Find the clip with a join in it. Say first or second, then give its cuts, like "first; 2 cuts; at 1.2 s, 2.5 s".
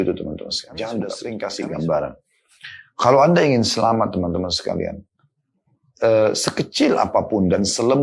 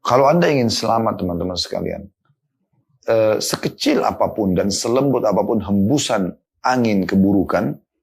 first; 1 cut; at 1.3 s